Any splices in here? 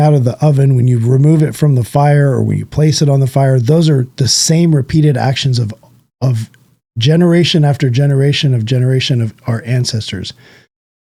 no; 0 cuts

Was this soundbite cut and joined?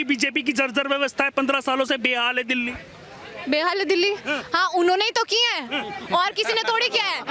no; 0 cuts

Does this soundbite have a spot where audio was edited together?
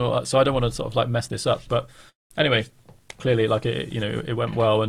no; 0 cuts

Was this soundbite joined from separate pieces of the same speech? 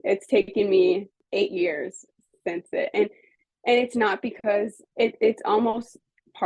yes; 2 cuts; at 1.2 s, 4.8 s

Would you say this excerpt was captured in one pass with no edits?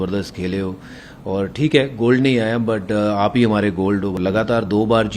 no; 1 cut; at 4.2 s

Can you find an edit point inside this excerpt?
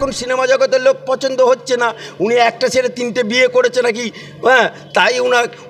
no; 0 cuts

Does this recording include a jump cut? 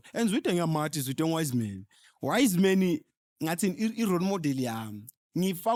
no; 0 cuts

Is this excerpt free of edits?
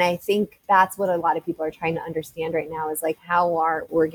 yes; 0 cuts

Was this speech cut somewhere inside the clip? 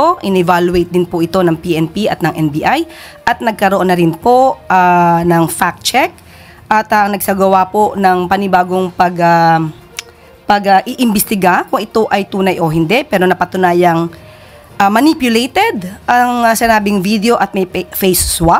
no; 0 cuts

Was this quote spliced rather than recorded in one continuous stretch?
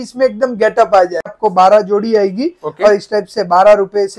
yes; 1 cut; at 1.3 s

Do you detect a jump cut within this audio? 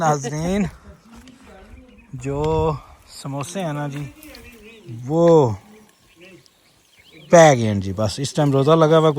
no; 0 cuts

